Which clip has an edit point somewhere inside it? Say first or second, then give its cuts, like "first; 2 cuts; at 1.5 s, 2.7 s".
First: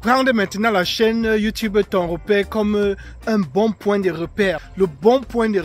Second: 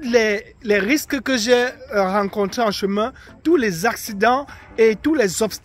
first; 1 cut; at 4.7 s